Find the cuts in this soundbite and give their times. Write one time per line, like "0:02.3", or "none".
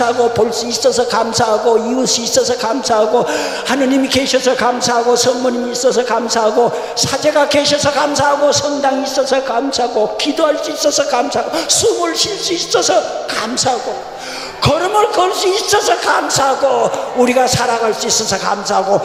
none